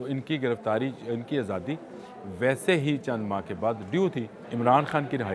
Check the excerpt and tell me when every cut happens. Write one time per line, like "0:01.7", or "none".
0:04.4